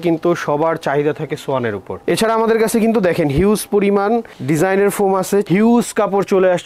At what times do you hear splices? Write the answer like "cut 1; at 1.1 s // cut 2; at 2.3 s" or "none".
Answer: cut 1; at 1.9 s // cut 2; at 5.5 s